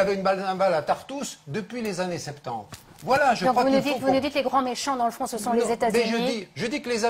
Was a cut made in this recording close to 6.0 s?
no; 1 cut; at 3.7 s

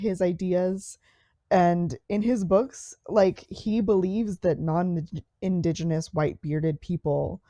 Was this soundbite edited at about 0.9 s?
no; 0 cuts

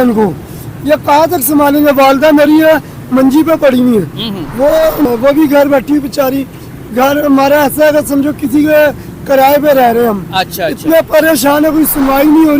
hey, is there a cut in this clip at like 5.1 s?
yes; 1 cut; at 5.1 s

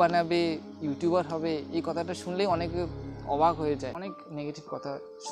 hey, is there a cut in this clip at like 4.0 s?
yes; 1 cut; at 4.0 s

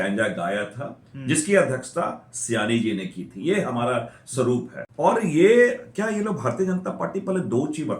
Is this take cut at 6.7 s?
no; 1 cut; at 4.8 s

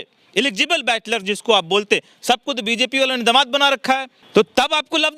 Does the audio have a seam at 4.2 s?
yes; 1 cut; at 4.2 s

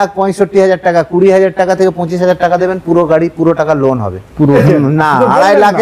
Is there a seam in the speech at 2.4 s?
no; 1 cut; at 4.6 s

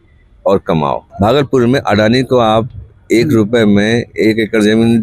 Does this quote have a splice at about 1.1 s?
yes; 1 cut; at 1.1 s

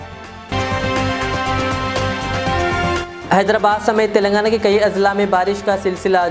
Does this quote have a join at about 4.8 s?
no; 0 cuts

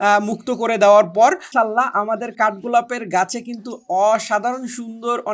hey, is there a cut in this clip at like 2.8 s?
no; 1 cut; at 1.5 s

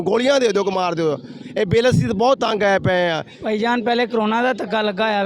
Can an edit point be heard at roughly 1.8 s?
no; 1 cut; at 3.3 s

